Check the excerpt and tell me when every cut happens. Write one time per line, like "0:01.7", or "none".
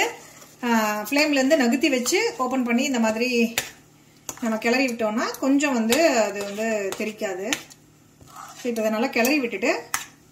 none